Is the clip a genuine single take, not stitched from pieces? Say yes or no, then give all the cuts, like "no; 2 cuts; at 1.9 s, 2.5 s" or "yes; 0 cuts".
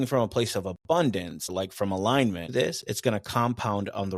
no; 2 cuts; at 1.5 s, 2.5 s